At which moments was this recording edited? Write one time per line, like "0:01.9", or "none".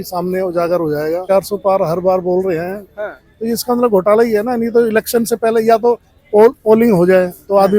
0:01.2